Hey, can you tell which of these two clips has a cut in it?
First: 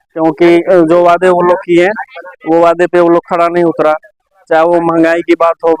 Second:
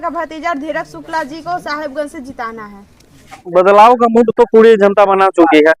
second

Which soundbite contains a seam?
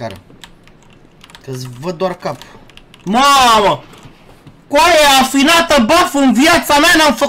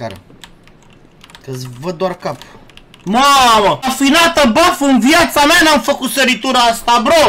second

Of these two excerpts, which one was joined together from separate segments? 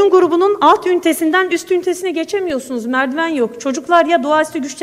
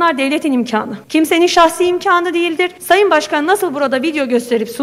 second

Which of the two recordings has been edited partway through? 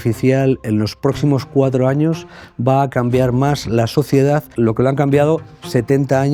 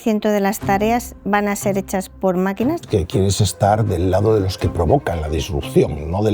second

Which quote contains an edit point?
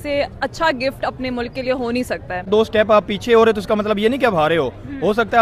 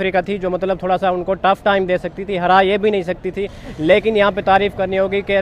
first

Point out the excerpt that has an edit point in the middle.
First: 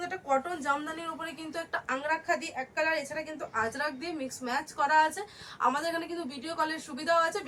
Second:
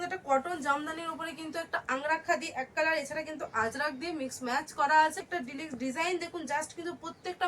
second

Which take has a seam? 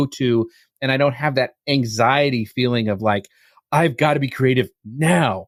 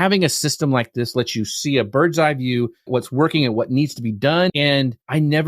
second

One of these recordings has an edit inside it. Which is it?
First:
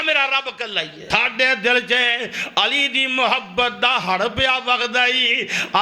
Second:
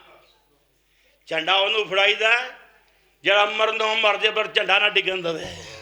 first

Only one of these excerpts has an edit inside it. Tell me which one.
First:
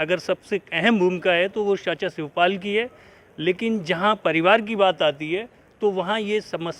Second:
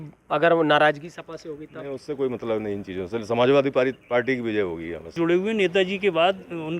second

